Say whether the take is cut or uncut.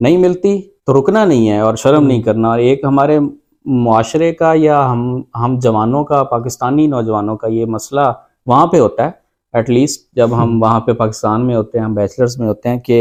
uncut